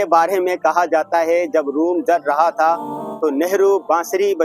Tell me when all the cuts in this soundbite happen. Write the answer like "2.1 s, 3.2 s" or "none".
none